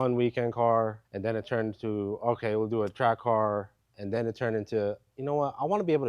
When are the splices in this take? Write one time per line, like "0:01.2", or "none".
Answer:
0:01.0